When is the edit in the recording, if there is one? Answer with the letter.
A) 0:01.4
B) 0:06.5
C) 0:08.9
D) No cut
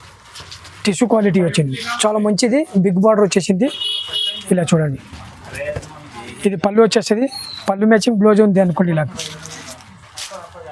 D